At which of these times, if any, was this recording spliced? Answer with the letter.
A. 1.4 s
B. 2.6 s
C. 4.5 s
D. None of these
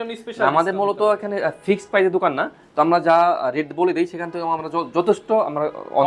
D